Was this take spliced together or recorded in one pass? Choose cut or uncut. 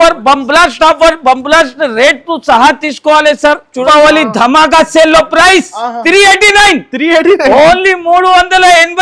cut